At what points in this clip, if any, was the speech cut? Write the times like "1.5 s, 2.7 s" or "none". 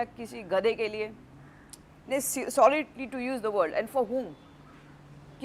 none